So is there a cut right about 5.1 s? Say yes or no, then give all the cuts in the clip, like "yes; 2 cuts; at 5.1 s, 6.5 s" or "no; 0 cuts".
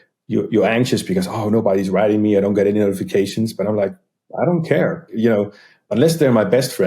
yes; 1 cut; at 5.1 s